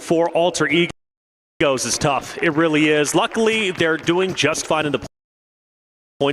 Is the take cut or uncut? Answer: uncut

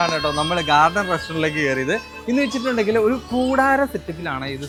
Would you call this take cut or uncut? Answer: uncut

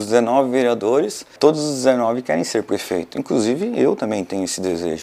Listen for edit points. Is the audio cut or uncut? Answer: cut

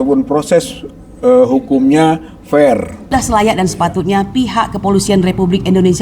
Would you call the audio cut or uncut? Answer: cut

